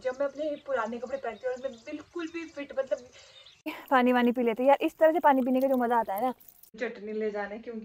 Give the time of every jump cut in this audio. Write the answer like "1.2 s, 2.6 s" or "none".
3.7 s, 6.8 s